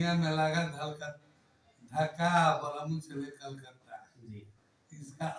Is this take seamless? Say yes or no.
yes